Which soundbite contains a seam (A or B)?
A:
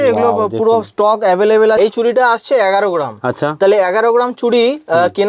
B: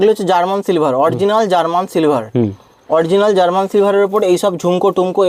A